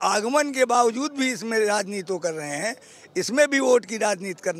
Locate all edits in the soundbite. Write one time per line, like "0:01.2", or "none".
none